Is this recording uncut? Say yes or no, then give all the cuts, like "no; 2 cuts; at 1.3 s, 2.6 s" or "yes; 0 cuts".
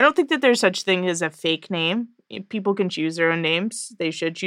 yes; 0 cuts